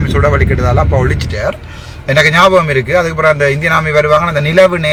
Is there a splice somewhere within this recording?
no; 0 cuts

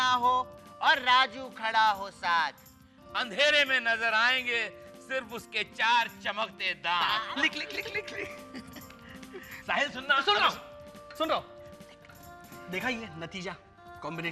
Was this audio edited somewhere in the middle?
no; 0 cuts

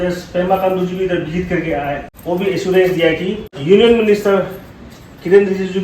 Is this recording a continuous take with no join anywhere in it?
no; 2 cuts; at 2.1 s, 3.6 s

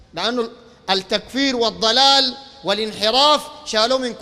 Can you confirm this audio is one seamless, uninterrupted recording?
yes; 0 cuts

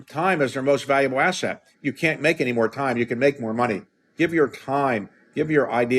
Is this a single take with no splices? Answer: no; 1 cut; at 4.0 s

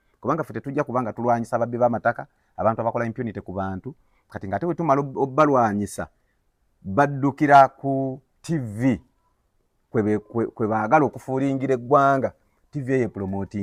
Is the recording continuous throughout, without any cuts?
yes; 0 cuts

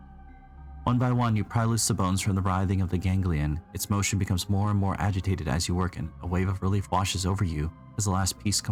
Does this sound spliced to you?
no; 0 cuts

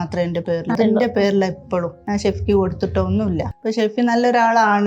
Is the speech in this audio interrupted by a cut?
yes; 3 cuts; at 0.8 s, 2.0 s, 3.5 s

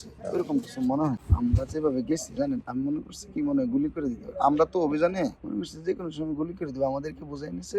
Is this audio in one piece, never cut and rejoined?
no; 1 cut; at 1.2 s

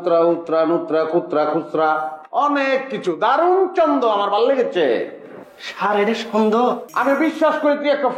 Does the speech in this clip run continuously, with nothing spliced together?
no; 1 cut; at 6.8 s

